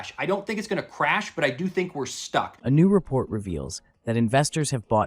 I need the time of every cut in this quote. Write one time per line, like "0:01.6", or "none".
0:02.5